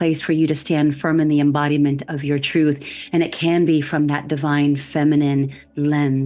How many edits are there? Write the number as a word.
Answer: zero